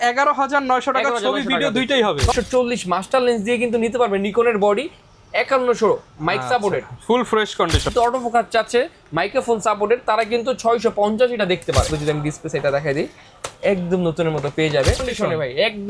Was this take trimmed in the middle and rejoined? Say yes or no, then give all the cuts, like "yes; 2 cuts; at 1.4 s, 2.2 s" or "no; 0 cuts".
yes; 4 cuts; at 2.3 s, 7.9 s, 11.9 s, 15.1 s